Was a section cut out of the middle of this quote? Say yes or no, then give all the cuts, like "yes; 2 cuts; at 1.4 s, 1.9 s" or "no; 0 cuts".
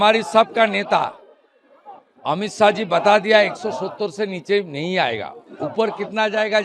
no; 0 cuts